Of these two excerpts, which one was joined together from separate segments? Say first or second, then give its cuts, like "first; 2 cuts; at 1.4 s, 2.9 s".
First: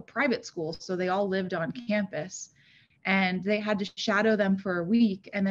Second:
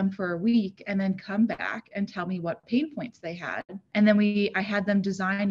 second; 1 cut; at 3.7 s